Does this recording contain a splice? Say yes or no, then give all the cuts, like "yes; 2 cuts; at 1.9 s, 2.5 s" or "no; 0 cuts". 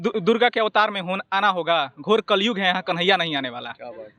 no; 0 cuts